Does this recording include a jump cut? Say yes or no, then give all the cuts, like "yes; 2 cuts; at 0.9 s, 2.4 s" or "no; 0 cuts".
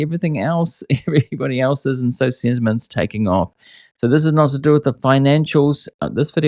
no; 0 cuts